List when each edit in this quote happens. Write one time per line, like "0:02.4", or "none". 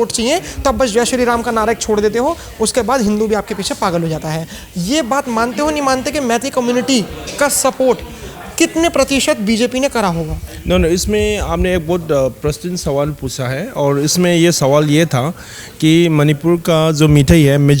none